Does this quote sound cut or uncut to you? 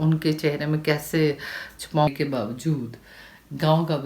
cut